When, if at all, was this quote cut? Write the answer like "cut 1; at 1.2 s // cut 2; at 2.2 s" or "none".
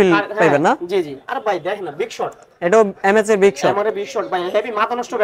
none

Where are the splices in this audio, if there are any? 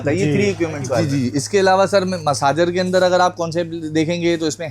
cut 1; at 1.1 s

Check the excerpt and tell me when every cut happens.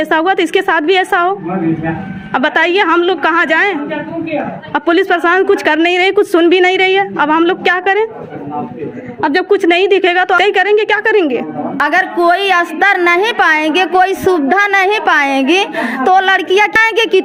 none

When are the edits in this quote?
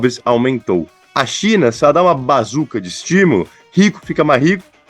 cut 1; at 1.0 s

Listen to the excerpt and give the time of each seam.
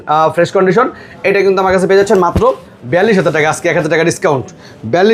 none

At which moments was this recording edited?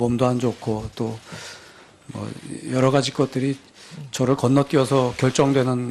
cut 1; at 3.1 s

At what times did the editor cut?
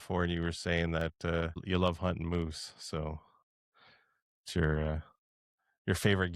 cut 1; at 1.6 s

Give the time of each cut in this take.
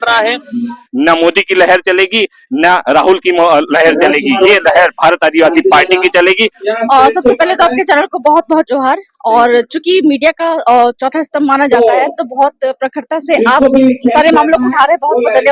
cut 1; at 0.8 s // cut 2; at 6.5 s

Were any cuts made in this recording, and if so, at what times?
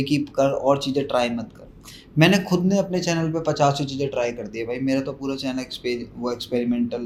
none

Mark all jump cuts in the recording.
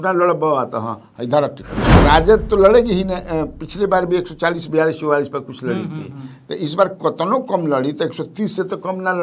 cut 1; at 2.0 s

